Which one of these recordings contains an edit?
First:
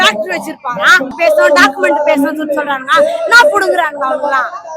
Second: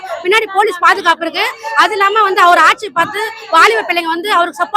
first; 1 cut; at 1.1 s

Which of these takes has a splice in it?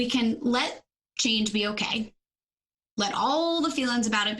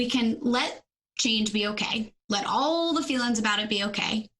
second; 1 cut; at 2.2 s

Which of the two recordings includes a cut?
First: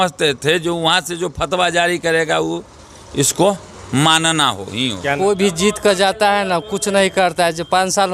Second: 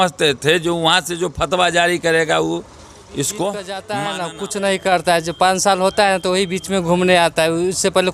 second; 1 cut; at 4.0 s

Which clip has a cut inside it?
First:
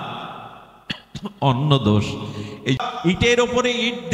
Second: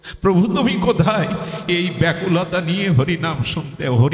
first; 1 cut; at 2.8 s

